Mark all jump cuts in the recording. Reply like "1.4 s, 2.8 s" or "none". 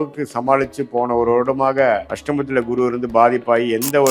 2.1 s